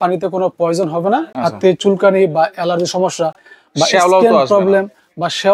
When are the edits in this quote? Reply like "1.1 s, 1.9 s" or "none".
none